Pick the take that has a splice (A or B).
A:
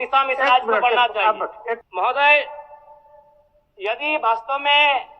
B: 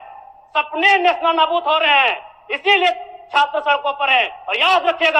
A